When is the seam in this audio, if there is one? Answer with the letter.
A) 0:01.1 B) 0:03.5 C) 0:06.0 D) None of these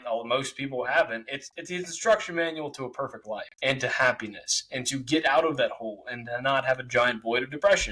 B